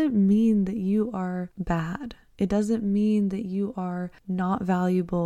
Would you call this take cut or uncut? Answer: cut